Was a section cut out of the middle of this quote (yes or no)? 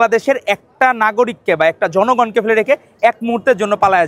no